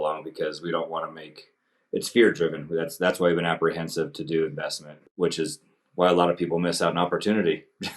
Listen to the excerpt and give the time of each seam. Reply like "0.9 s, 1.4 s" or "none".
5.0 s